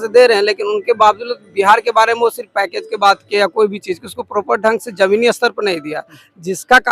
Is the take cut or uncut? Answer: uncut